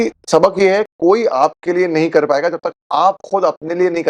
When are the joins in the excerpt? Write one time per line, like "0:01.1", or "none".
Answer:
none